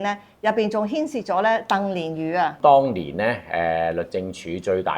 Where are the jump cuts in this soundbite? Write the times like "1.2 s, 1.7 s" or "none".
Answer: 2.6 s